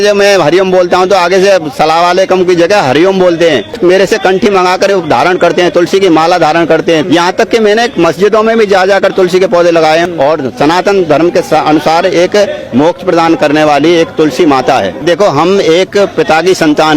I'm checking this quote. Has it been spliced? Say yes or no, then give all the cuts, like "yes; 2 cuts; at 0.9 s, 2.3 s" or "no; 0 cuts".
yes; 4 cuts; at 3.8 s, 7.0 s, 10.0 s, 15.0 s